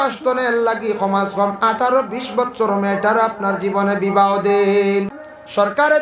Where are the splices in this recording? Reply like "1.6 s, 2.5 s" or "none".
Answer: 5.1 s